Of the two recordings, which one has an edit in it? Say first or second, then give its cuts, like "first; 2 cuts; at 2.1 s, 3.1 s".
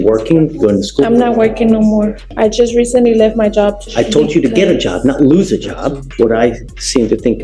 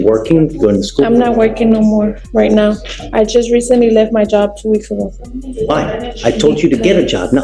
first; 3 cuts; at 2.2 s, 3.8 s, 6.0 s